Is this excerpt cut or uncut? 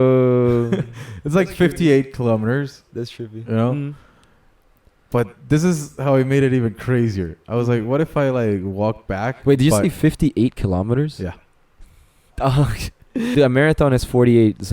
cut